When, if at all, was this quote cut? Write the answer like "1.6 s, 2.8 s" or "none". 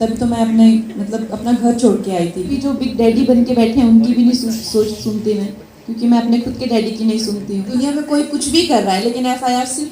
2.5 s, 7.7 s